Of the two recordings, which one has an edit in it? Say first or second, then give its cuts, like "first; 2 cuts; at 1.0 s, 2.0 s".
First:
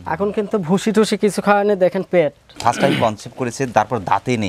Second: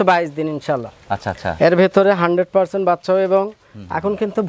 first; 1 cut; at 2.4 s